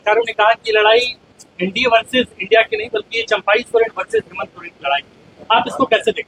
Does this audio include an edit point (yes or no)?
no